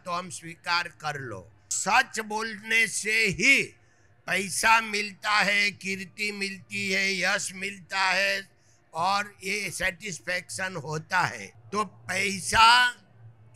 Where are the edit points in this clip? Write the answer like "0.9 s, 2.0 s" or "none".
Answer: 1.8 s, 11.5 s